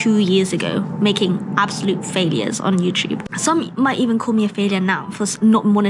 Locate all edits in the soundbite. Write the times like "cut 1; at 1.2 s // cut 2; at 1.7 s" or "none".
none

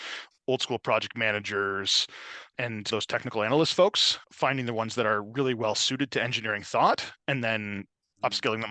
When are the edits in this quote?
none

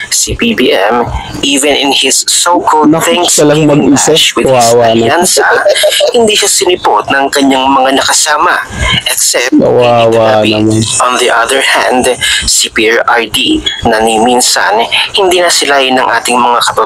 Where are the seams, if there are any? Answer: none

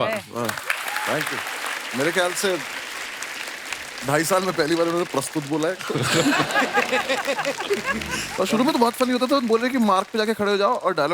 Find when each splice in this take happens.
cut 1; at 8.2 s

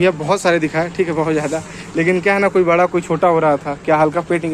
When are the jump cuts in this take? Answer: none

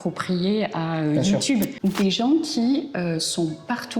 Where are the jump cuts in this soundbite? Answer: cut 1; at 1.7 s

